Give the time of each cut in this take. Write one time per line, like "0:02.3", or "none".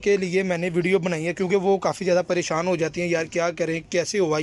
none